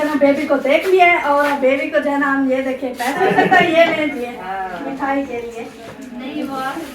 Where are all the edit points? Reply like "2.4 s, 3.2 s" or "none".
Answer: 3.2 s